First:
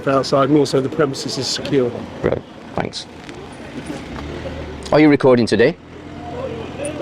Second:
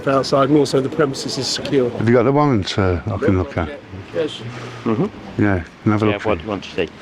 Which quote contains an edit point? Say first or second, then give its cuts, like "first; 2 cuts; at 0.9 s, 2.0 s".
second; 1 cut; at 2.0 s